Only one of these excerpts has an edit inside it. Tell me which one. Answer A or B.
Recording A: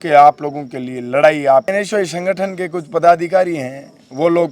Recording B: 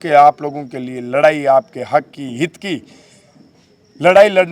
A